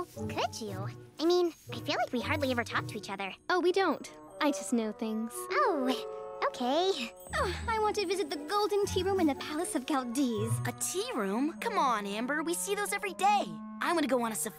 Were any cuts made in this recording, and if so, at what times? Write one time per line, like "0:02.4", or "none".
none